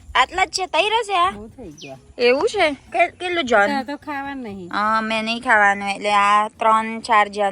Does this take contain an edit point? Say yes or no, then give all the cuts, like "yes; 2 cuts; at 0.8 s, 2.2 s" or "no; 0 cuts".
no; 0 cuts